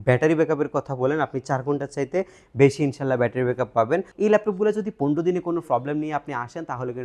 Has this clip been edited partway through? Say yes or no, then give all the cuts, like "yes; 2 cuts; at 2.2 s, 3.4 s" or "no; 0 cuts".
yes; 1 cut; at 4.1 s